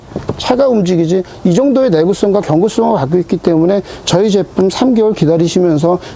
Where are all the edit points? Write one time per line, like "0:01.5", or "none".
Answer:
none